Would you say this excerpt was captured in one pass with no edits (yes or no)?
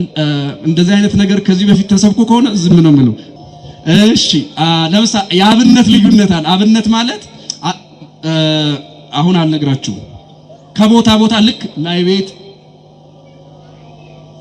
no